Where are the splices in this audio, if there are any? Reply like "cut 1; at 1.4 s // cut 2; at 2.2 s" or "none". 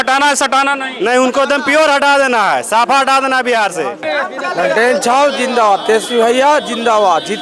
cut 1; at 4.1 s